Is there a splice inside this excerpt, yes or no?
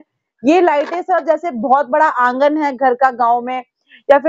no